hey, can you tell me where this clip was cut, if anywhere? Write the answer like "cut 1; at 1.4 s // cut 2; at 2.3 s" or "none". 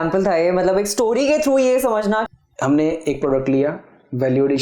cut 1; at 2.2 s